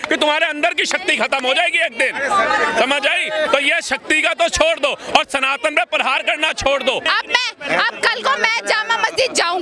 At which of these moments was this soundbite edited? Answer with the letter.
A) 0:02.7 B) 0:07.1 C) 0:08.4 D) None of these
B